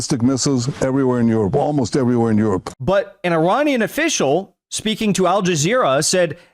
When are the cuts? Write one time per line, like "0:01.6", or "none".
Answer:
0:02.7